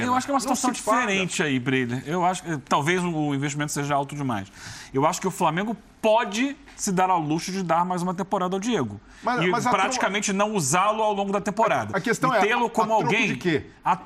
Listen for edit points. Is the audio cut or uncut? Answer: uncut